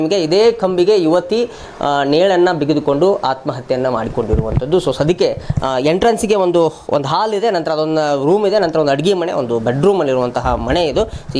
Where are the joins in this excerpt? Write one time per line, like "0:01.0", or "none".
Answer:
none